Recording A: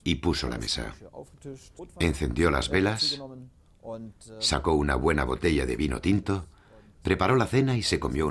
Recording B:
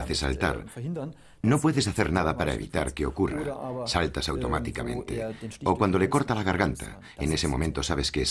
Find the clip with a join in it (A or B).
A